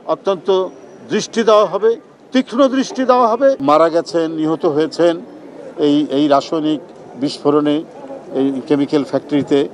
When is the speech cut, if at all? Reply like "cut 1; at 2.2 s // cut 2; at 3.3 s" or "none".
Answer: cut 1; at 3.6 s